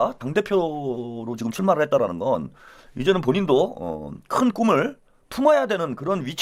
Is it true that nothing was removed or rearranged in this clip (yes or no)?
yes